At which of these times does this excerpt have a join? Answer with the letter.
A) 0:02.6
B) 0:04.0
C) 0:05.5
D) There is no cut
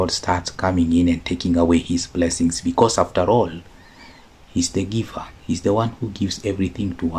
D